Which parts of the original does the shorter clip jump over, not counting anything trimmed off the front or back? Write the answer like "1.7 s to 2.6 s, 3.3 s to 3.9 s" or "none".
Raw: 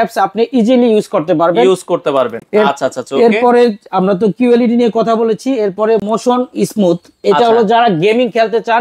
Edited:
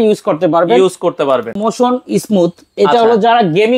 2.5 s to 6.1 s